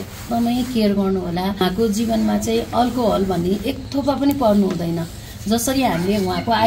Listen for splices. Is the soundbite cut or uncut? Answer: cut